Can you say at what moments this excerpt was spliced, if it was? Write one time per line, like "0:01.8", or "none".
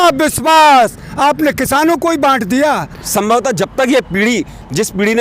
0:03.0